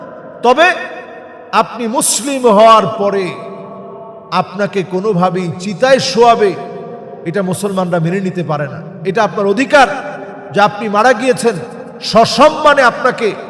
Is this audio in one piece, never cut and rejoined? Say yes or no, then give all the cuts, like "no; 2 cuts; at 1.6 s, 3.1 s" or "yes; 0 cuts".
yes; 0 cuts